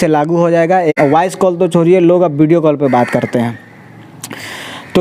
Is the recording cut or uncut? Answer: cut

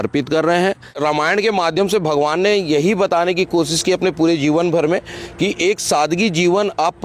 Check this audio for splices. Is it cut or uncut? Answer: cut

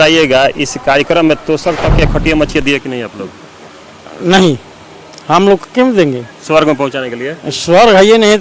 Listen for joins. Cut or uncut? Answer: uncut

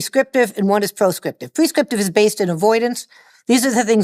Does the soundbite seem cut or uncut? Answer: uncut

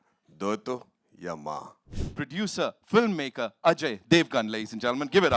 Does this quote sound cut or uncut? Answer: cut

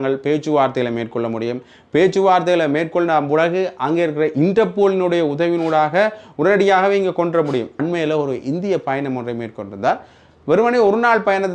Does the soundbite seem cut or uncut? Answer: cut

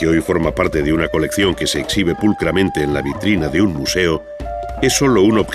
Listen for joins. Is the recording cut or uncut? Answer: cut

